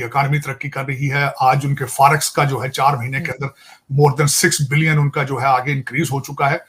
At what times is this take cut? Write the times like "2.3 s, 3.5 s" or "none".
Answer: none

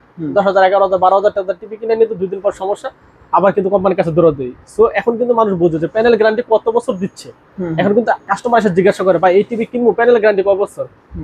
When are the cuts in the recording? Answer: none

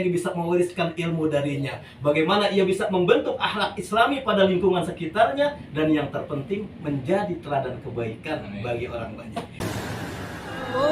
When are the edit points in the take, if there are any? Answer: 9.6 s

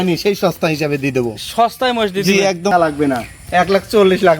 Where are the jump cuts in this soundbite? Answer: 2.7 s

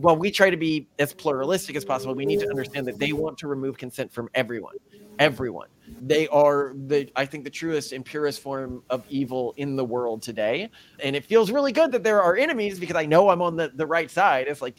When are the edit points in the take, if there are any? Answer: none

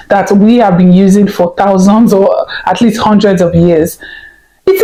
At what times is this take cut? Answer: none

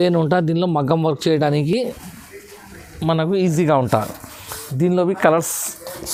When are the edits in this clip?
none

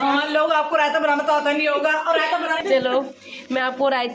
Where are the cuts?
2.6 s

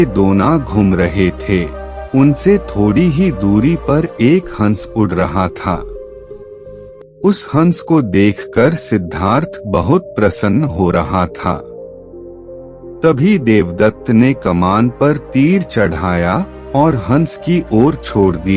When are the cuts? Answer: none

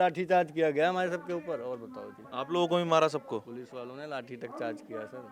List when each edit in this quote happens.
none

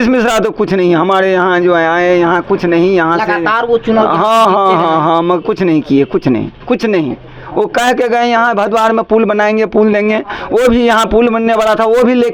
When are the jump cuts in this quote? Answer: none

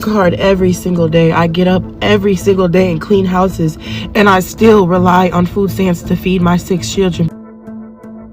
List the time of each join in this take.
7.3 s

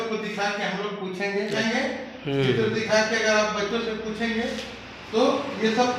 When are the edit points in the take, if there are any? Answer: 1.6 s

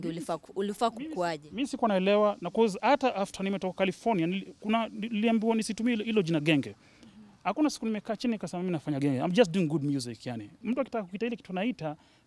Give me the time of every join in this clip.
none

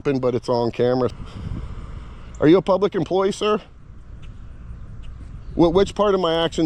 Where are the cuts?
1.1 s

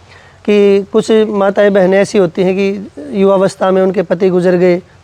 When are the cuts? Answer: none

